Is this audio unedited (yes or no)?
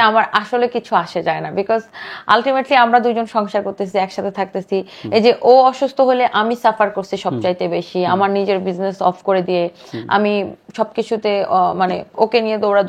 yes